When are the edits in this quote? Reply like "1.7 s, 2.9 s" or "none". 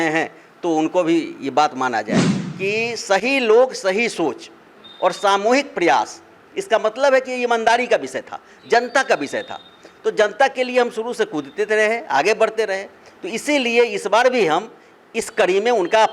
2.3 s